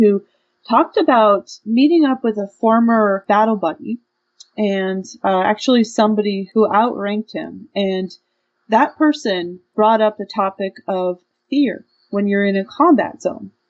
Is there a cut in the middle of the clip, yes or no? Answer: yes